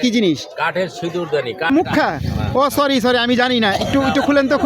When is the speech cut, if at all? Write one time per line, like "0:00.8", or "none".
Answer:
0:01.7